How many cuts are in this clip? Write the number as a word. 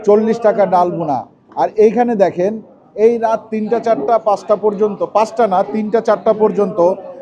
zero